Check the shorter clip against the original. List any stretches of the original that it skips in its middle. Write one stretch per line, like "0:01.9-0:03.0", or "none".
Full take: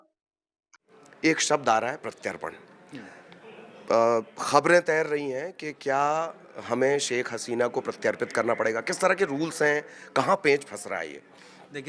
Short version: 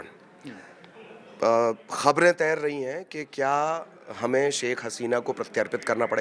none